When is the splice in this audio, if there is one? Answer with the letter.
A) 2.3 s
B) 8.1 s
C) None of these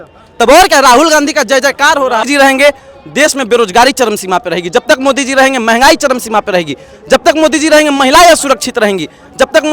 A